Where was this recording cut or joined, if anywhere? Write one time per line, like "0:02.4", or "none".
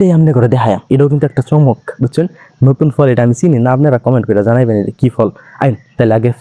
none